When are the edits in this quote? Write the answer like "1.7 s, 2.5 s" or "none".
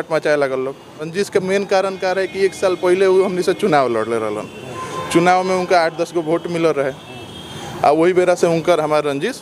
1.1 s